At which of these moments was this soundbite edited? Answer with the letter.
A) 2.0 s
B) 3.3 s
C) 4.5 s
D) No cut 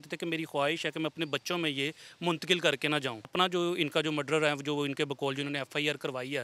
B